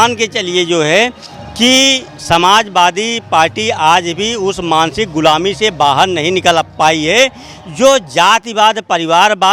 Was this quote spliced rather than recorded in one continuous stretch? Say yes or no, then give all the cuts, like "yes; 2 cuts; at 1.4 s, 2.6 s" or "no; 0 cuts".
no; 0 cuts